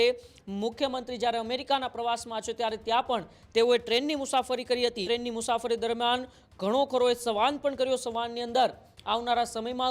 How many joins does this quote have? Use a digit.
1